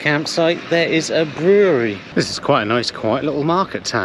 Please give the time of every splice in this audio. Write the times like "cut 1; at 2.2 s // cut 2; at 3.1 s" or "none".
cut 1; at 2.0 s